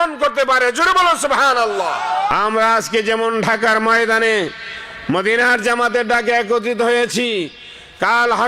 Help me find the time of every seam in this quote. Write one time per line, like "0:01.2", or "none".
0:02.3